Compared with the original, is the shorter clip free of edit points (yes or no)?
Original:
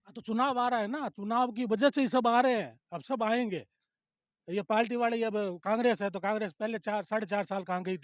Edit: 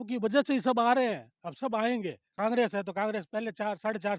no